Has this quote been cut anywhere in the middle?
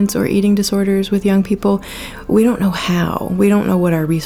no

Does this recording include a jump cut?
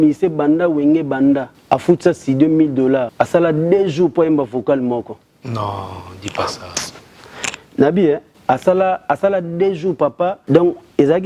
yes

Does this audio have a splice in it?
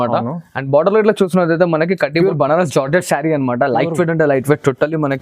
yes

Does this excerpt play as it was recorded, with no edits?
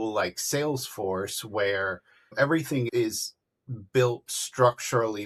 yes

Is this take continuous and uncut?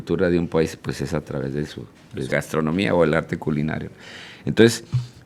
yes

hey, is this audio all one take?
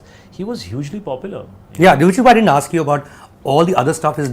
yes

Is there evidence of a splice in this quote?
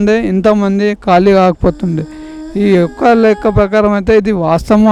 no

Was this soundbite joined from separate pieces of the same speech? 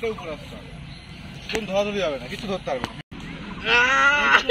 yes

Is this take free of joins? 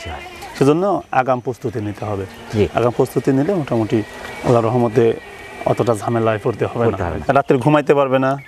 no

